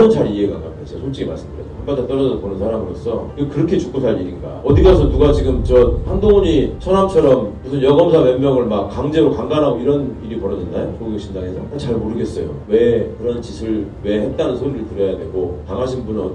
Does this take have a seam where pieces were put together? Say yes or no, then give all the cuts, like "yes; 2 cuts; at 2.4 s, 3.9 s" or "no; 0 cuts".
no; 0 cuts